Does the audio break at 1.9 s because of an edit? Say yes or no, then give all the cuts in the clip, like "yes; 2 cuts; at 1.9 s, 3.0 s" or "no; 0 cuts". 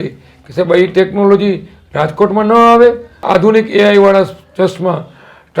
no; 1 cut; at 3.2 s